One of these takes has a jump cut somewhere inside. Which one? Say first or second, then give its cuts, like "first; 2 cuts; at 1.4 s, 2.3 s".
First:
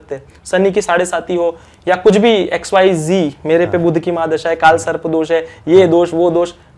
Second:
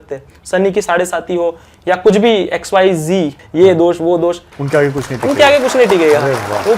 second; 2 cuts; at 3.4 s, 4.5 s